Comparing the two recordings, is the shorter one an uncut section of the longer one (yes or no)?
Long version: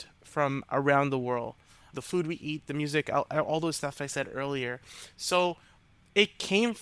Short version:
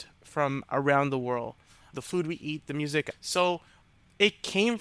no